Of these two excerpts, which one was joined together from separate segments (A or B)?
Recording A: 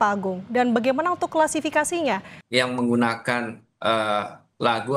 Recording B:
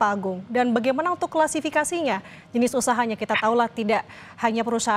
A